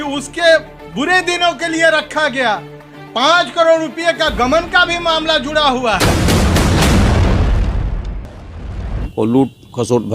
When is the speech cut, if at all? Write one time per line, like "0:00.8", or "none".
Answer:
0:08.8